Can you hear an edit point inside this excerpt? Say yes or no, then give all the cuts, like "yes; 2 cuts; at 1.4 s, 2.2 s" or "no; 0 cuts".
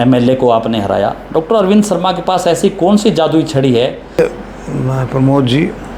yes; 1 cut; at 4.2 s